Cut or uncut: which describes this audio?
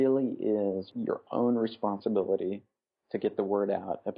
cut